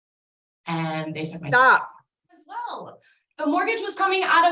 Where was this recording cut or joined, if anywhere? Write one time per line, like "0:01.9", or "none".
0:02.5